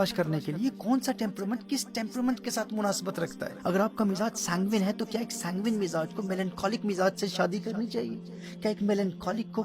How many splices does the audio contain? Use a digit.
1